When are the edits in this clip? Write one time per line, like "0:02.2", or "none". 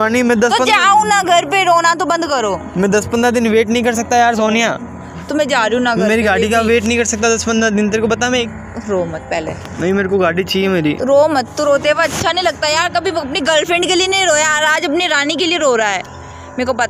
0:08.4